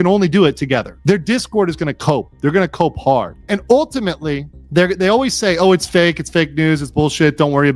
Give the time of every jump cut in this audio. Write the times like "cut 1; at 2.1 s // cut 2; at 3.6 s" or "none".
cut 1; at 0.9 s // cut 2; at 3.4 s // cut 3; at 4.5 s